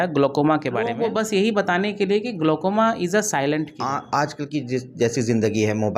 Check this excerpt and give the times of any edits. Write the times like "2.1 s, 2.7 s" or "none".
0.9 s, 3.3 s